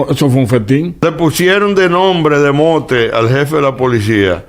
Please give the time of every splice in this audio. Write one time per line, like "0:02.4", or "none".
0:01.0